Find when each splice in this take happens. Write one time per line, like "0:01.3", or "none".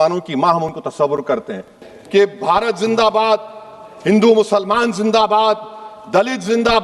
0:01.7